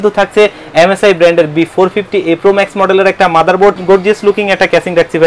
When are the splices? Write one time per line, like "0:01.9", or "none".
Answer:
0:03.8